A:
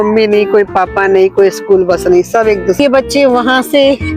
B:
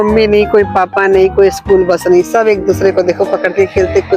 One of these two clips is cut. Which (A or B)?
A